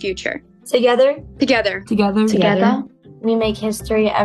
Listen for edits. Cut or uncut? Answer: uncut